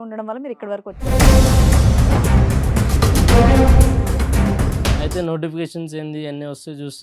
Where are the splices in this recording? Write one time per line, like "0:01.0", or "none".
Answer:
0:01.1
0:05.0